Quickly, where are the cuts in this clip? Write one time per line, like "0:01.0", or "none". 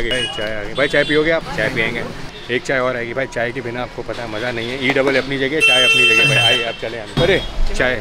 none